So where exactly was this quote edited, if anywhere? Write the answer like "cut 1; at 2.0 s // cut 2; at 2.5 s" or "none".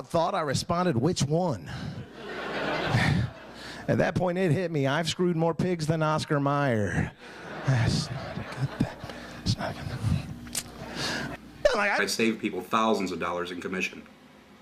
none